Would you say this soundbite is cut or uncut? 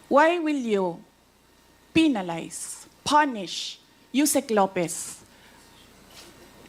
uncut